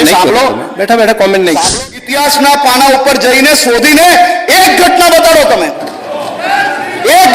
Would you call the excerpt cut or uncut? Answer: cut